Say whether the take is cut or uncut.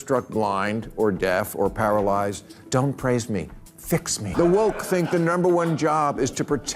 cut